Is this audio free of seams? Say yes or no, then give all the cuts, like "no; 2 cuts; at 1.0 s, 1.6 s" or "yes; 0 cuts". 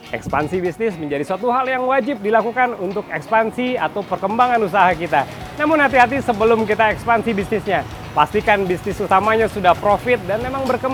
yes; 0 cuts